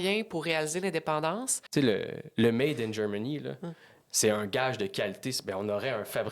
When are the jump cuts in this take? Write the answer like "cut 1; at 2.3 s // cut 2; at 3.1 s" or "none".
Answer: cut 1; at 1.5 s